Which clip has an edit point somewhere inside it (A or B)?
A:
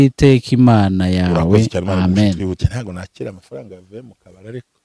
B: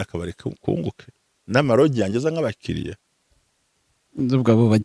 A